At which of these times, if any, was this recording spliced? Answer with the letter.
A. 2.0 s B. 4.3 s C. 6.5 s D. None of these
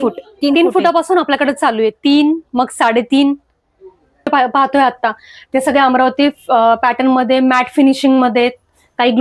B